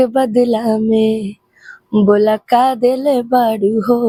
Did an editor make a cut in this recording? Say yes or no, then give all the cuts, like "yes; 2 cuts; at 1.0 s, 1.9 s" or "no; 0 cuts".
no; 0 cuts